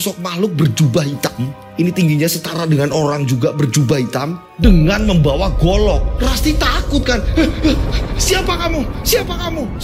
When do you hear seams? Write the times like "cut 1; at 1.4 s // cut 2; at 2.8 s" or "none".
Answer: none

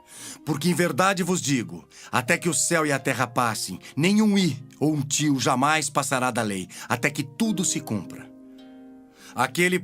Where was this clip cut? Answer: cut 1; at 5.1 s

